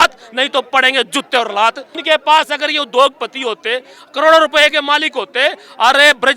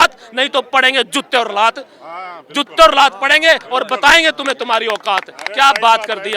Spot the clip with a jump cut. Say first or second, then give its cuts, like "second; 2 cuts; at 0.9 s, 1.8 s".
first; 1 cut; at 1.9 s